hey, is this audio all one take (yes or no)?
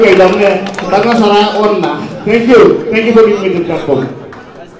yes